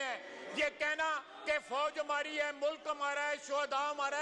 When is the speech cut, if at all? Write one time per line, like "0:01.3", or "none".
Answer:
none